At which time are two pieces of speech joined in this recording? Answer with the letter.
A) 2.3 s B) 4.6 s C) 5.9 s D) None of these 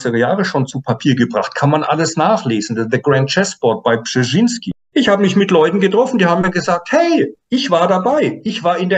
B